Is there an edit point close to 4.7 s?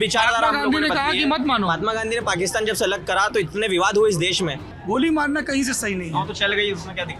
yes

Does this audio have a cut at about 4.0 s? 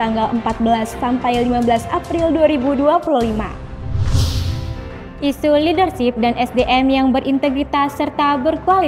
yes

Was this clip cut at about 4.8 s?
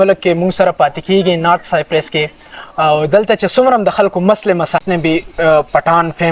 yes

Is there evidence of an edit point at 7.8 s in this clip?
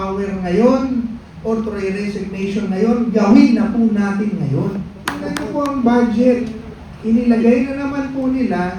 no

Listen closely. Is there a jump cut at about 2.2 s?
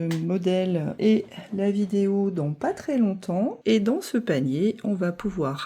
no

